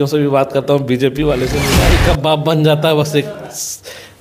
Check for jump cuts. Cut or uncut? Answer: cut